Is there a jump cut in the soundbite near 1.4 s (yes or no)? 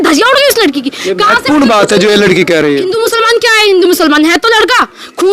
no